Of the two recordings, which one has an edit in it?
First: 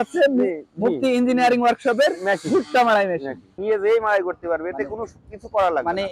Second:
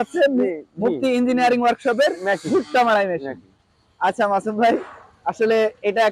first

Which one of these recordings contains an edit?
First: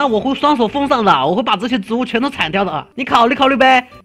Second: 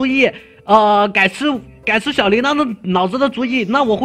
first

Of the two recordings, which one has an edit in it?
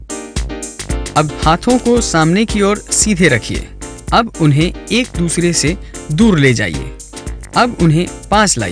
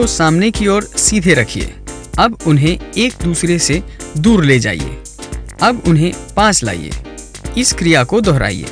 first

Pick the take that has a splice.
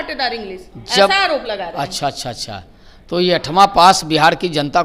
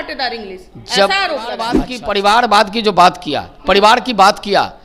second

